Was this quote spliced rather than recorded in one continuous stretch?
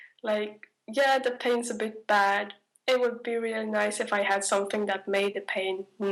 no; 0 cuts

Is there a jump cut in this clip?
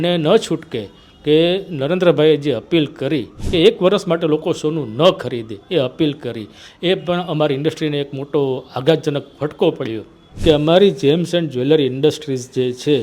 yes; 2 cuts; at 3.4 s, 10.3 s

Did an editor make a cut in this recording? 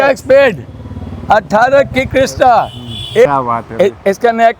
yes; 1 cut; at 3.2 s

